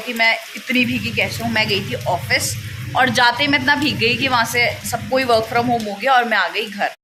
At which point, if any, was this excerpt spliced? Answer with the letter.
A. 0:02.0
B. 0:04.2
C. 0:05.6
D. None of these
D